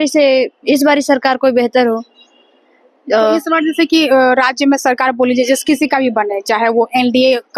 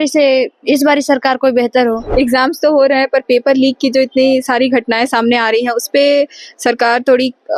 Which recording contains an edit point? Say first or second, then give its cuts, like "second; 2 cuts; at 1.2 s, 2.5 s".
second; 1 cut; at 2.0 s